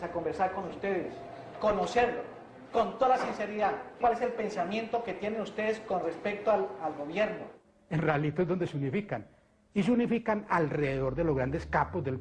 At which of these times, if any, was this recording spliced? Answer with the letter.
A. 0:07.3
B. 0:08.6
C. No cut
B